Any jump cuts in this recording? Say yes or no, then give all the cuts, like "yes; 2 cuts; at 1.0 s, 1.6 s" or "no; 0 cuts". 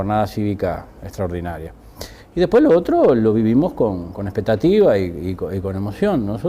yes; 1 cut; at 0.9 s